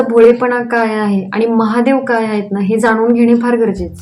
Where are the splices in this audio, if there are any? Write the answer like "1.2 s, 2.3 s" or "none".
none